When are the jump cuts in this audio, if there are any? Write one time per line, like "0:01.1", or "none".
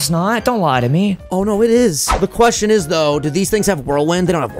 0:01.2
0:02.3